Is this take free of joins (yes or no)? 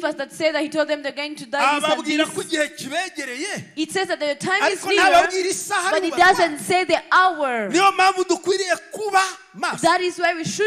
yes